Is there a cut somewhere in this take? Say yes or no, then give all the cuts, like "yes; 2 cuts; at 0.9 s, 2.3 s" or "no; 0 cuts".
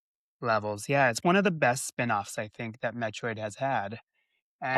no; 0 cuts